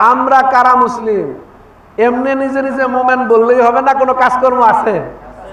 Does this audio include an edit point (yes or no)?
no